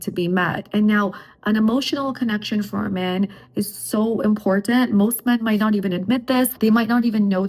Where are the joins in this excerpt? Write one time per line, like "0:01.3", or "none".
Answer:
0:06.5